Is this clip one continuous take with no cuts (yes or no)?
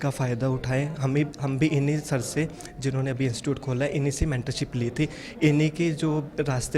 yes